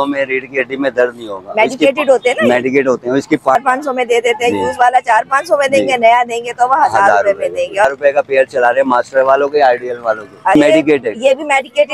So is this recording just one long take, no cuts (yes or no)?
no